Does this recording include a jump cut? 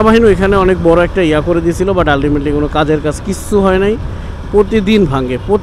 no; 0 cuts

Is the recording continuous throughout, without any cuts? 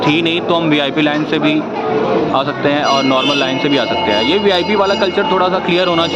yes; 0 cuts

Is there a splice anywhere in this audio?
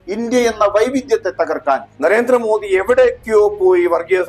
yes; 1 cut; at 1.9 s

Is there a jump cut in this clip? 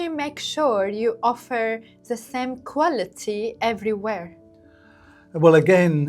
no; 0 cuts

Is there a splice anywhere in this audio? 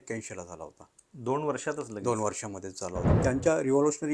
yes; 1 cut; at 2.9 s

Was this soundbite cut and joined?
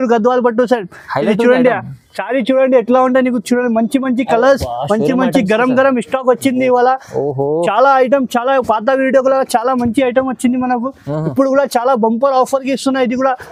no; 0 cuts

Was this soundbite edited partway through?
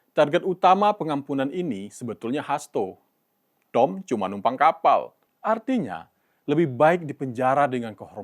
yes; 1 cut; at 5.2 s

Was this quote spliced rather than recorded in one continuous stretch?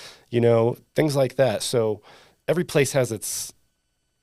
no; 0 cuts

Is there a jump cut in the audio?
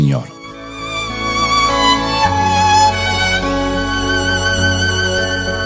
no; 0 cuts

